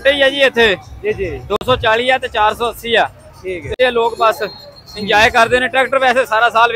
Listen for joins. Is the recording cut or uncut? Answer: cut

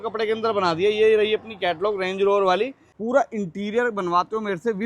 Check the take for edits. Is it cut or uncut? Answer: cut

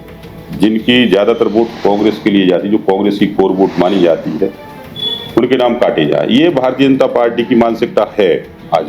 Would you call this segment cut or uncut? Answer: uncut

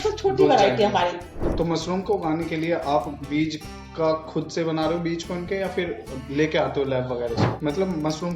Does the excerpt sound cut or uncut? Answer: cut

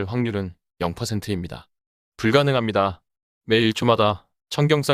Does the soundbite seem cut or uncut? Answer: uncut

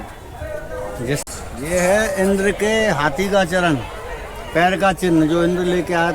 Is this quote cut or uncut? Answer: cut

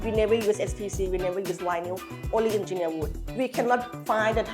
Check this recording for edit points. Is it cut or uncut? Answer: cut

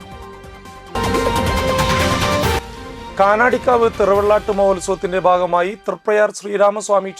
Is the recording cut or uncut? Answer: cut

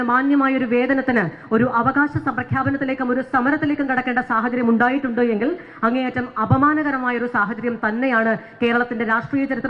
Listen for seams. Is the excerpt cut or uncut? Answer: uncut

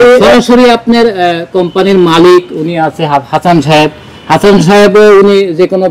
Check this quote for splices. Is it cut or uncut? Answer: uncut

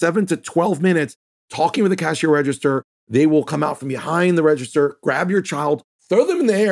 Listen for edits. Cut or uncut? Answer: uncut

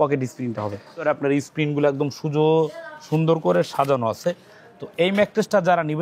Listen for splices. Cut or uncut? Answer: cut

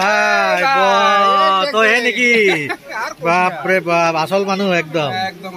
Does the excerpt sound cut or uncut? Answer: uncut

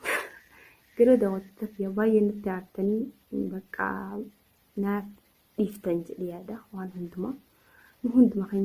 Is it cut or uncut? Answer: uncut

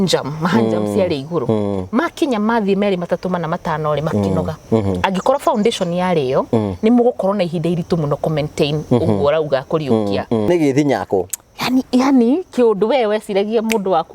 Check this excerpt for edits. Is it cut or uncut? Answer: cut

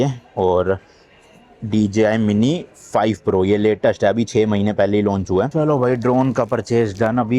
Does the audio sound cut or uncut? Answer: cut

